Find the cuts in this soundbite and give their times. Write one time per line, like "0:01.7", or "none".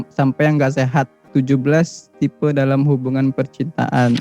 0:01.3